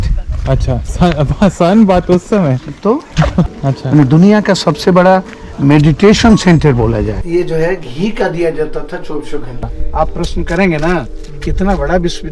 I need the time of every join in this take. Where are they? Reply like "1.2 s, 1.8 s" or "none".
3.5 s, 7.2 s, 9.8 s